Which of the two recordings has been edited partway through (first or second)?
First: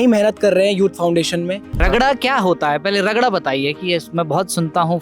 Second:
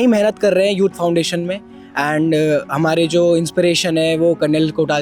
first